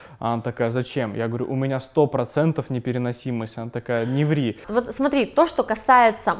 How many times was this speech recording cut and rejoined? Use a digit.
1